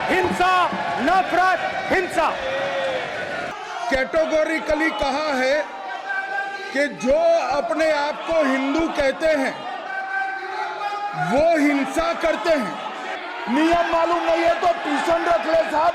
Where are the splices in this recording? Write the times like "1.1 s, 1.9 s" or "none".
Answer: 3.5 s, 13.1 s